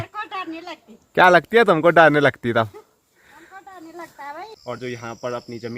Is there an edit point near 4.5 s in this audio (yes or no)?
yes